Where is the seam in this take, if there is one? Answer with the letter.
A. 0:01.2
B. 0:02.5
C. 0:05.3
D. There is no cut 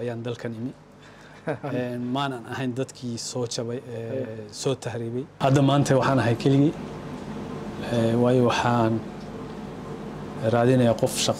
C